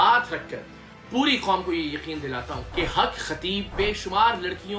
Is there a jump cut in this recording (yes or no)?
yes